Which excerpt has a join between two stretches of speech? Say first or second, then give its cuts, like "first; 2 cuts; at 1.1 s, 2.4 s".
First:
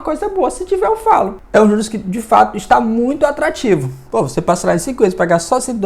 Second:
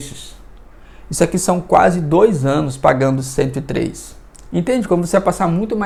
first; 1 cut; at 1.4 s